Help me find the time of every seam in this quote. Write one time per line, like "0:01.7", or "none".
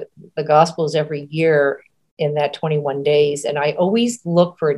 none